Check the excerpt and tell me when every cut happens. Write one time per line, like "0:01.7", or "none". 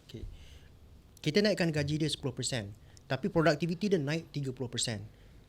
0:01.0